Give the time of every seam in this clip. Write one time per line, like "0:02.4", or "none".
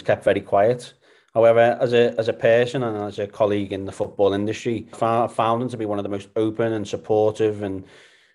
0:05.0